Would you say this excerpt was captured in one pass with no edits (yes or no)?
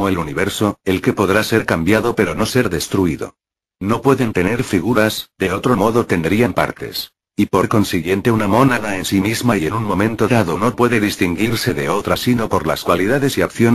no